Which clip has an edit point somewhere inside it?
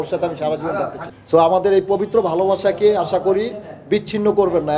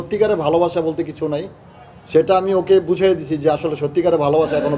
first; 1 cut; at 1.0 s

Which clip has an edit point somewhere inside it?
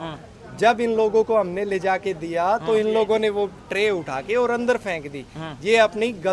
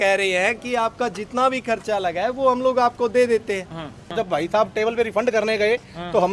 second; 1 cut; at 4.1 s

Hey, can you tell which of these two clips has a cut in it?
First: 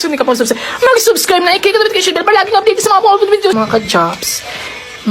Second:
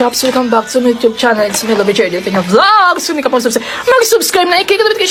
first; 1 cut; at 3.6 s

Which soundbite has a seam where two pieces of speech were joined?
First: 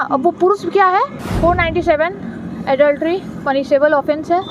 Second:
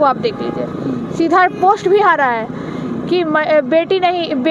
first; 1 cut; at 1.2 s

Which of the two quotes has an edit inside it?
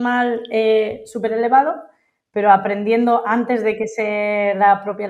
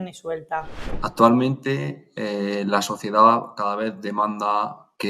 second; 1 cut; at 1.0 s

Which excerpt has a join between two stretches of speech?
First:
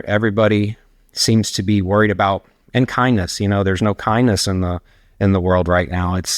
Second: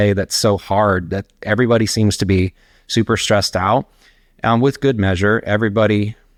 first; 1 cut; at 2.6 s

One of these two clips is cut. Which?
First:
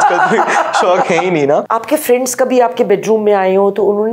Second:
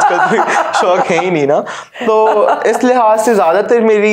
first; 1 cut; at 1.7 s

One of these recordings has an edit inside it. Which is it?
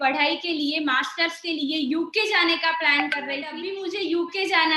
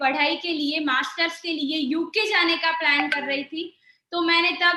first; 1 cut; at 3.6 s

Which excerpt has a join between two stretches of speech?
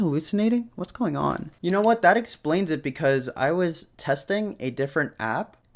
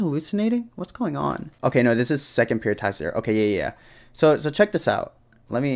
first; 1 cut; at 1.5 s

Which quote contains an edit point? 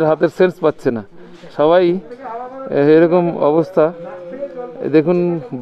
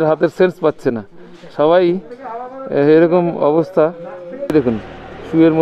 second; 1 cut; at 4.5 s

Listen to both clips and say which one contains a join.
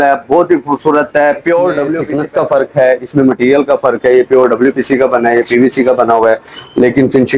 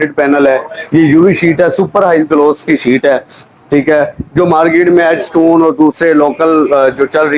first; 1 cut; at 2.0 s

